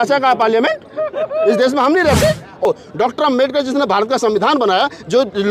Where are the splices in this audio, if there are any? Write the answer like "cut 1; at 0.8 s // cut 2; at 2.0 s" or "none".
cut 1; at 2.7 s